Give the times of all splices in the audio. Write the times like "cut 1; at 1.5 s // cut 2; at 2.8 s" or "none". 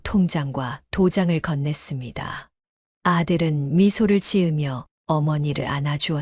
none